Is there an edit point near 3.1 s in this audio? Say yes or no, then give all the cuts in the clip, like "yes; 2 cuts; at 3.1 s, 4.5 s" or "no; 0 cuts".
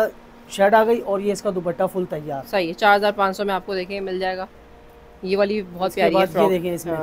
no; 0 cuts